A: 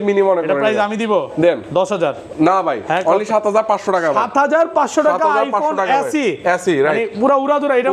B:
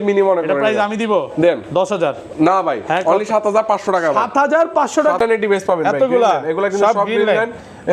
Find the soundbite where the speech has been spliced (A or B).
B